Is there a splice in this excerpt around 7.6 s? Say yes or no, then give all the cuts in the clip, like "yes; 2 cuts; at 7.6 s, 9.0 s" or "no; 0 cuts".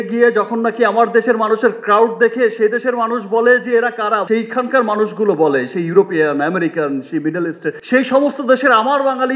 no; 0 cuts